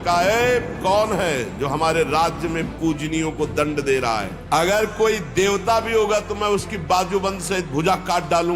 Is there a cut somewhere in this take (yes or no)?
yes